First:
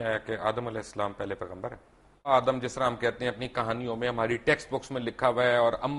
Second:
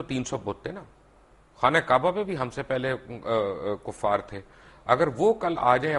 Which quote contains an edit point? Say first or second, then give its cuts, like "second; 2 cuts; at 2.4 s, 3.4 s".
first; 1 cut; at 2.3 s